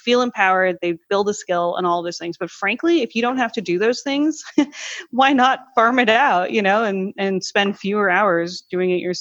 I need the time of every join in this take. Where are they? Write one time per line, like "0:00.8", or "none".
none